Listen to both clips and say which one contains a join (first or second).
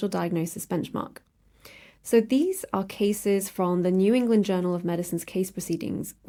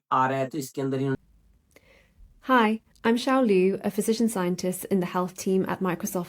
second